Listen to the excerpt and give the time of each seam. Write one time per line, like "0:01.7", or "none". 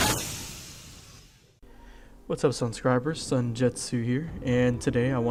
none